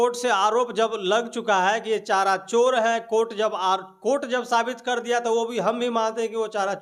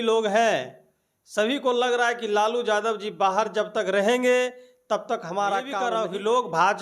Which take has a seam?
second; 1 cut; at 5.8 s

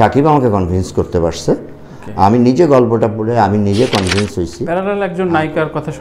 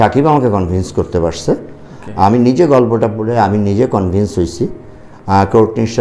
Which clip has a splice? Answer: first; 1 cut; at 4.6 s

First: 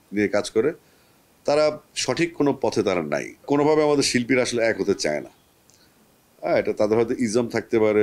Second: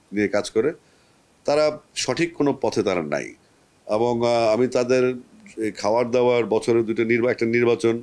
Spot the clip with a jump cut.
first; 1 cut; at 3.4 s

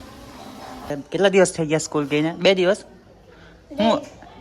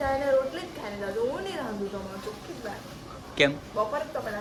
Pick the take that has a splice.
first; 1 cut; at 1.0 s

